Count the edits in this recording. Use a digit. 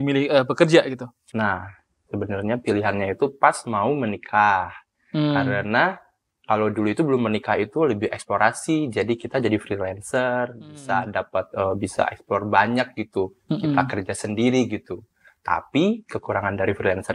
1